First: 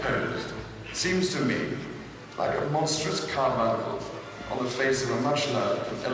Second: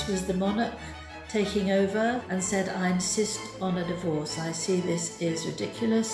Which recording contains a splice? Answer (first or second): second